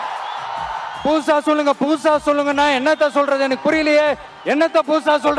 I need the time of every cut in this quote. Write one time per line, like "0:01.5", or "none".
0:00.9

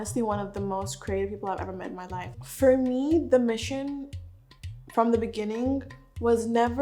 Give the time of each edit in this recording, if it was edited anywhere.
0:02.3

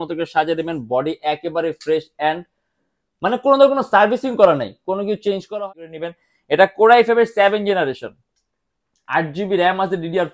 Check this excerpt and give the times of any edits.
0:05.6

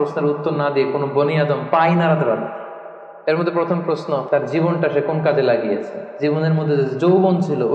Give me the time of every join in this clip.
0:03.1
0:04.3
0:06.0

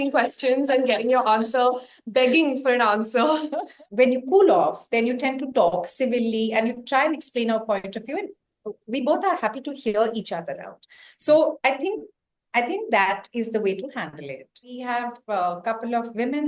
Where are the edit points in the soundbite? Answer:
0:03.7
0:14.8

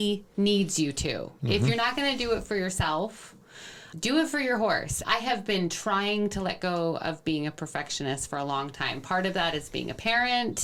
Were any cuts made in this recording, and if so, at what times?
none

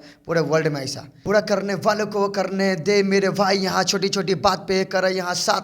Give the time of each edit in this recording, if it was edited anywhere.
0:01.2

